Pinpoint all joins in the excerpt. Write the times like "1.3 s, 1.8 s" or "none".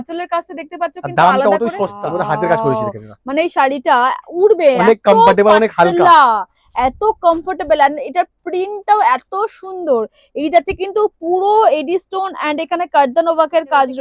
2.0 s